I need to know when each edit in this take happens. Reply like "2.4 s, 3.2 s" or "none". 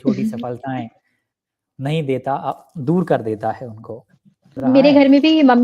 4.6 s